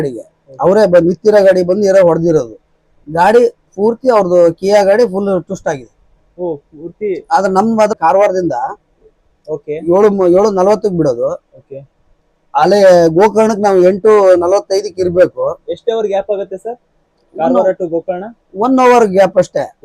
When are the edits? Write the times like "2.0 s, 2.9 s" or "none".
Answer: 7.9 s